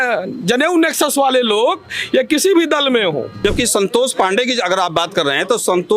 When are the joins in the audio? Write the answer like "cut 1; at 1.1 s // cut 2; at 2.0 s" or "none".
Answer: cut 1; at 3.4 s